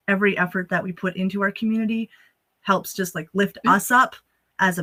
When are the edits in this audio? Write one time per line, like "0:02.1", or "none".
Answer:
none